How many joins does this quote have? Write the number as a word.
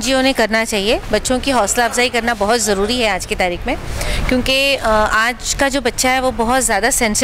zero